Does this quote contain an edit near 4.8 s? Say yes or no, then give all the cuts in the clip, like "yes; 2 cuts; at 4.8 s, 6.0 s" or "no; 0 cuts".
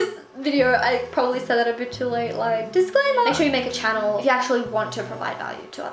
no; 1 cut; at 3.3 s